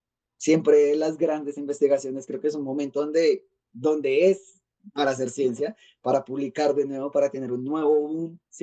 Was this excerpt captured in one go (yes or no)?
yes